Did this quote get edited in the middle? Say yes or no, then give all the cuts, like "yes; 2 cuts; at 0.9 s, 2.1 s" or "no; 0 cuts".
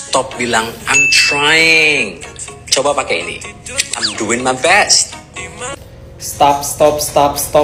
no; 0 cuts